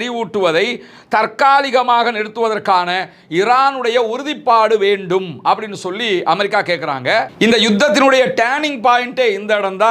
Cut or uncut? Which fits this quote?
uncut